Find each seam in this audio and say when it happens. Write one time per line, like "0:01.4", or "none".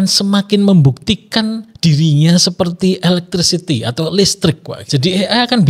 0:04.7